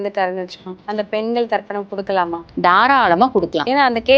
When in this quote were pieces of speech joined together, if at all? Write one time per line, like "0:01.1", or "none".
none